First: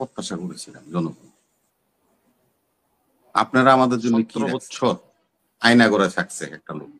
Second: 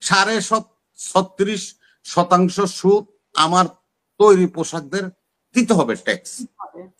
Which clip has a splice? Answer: first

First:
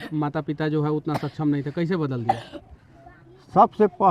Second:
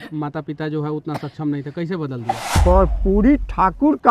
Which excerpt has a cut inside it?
second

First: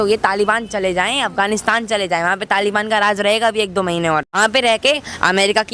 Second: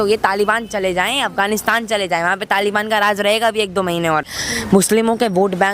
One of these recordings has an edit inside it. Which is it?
second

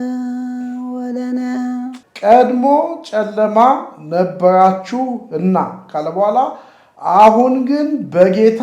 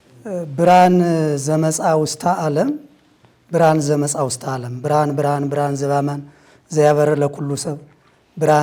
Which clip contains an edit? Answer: first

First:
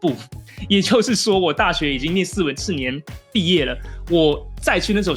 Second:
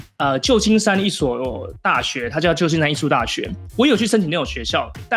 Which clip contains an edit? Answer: second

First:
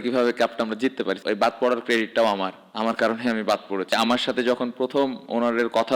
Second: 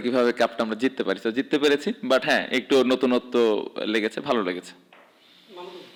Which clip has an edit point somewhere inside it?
first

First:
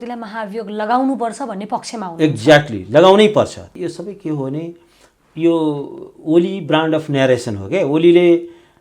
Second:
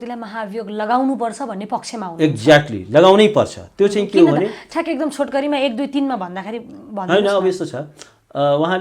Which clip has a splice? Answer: first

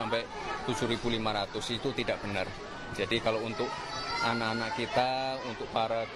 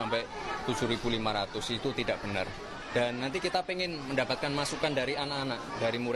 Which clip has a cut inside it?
second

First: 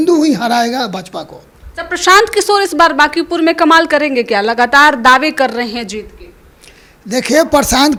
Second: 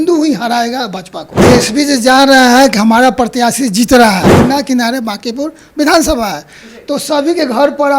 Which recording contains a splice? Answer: second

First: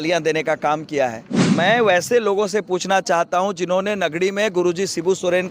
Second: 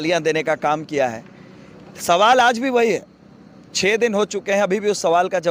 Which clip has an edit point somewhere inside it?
first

